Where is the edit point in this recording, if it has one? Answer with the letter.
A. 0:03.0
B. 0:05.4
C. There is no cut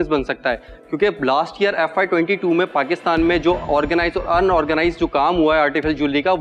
C